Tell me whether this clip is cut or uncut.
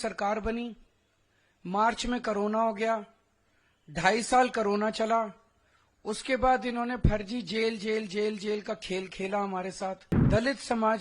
cut